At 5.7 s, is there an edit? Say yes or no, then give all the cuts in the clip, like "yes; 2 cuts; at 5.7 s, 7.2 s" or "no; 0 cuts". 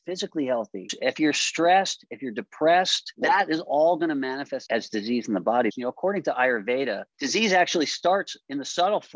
yes; 5 cuts; at 0.9 s, 3.0 s, 4.6 s, 5.7 s, 7.1 s